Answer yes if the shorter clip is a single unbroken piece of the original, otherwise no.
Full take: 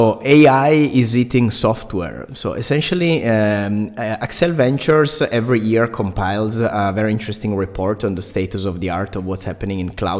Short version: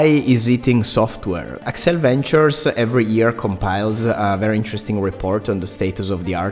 no